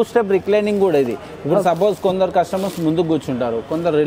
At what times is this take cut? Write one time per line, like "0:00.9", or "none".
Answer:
none